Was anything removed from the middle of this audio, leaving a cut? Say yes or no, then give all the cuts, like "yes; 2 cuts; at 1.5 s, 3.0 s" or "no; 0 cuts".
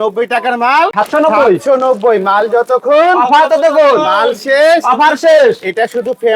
yes; 1 cut; at 0.9 s